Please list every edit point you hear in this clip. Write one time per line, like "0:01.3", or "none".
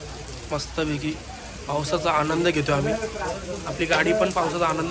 none